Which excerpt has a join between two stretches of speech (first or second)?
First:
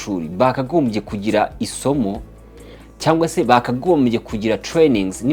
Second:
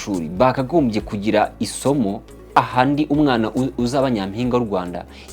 second